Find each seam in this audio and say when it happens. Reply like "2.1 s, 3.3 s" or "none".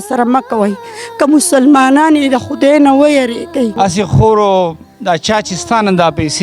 3.7 s